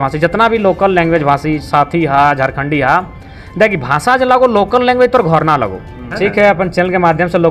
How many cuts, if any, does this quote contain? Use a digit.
1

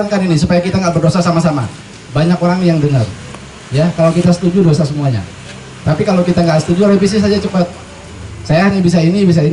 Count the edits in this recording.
0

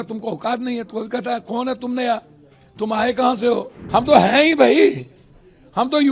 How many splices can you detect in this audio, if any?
1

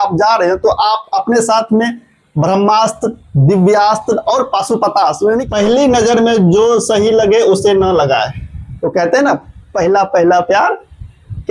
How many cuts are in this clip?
1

